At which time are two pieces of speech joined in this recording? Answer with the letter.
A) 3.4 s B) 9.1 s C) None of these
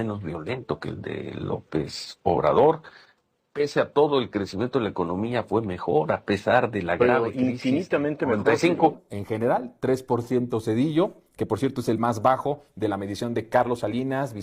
B